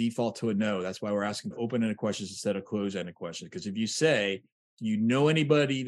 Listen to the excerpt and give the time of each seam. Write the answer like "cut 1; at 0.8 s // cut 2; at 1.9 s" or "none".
cut 1; at 1.5 s